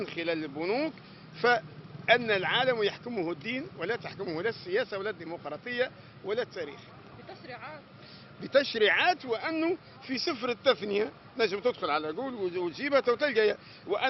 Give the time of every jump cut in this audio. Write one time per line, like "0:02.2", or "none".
none